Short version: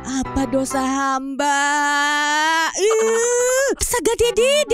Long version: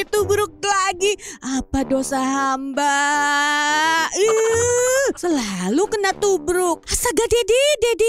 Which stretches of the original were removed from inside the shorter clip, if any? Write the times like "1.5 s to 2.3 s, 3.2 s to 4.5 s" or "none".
5.2 s to 6.9 s